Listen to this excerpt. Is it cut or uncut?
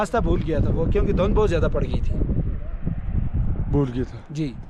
uncut